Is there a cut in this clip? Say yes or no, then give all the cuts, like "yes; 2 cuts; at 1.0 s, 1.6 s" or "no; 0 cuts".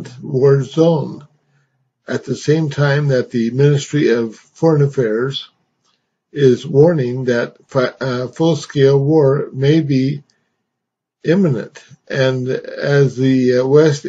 yes; 1 cut; at 4.3 s